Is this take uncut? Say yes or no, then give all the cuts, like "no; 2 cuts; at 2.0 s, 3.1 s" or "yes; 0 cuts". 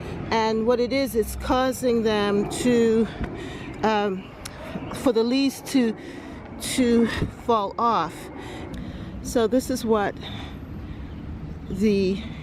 no; 1 cut; at 8.7 s